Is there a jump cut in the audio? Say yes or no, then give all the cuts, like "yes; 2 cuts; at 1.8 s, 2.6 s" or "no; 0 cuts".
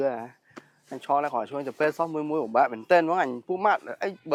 no; 0 cuts